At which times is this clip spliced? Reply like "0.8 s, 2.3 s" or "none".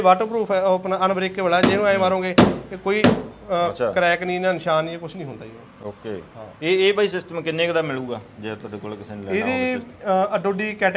none